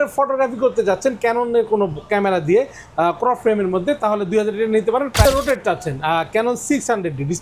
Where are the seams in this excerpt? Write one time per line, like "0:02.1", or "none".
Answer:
0:05.2